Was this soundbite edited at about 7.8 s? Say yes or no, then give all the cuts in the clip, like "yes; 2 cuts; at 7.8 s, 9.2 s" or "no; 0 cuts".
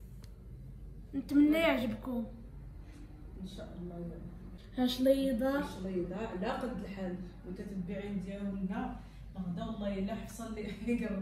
no; 1 cut; at 4.5 s